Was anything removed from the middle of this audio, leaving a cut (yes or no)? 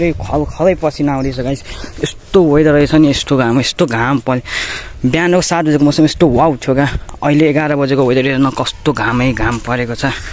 no